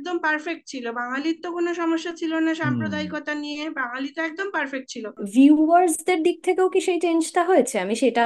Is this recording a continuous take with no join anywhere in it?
no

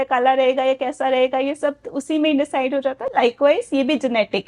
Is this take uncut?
yes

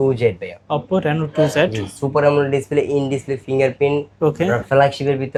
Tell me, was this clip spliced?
no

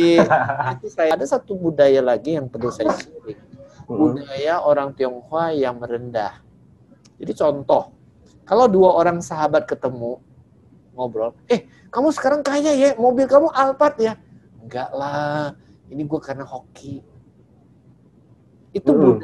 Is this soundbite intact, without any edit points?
no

